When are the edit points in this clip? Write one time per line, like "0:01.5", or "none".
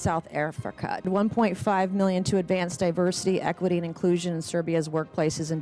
0:01.1